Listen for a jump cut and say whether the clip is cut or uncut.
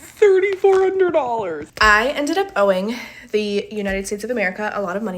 cut